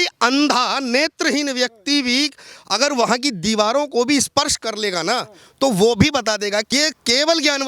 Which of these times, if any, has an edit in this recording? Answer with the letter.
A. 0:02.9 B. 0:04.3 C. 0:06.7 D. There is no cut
C